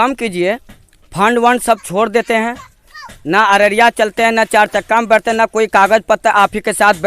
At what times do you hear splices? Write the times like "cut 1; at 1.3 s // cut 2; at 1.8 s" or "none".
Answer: none